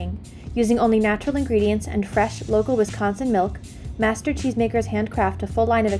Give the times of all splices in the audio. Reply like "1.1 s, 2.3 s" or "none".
none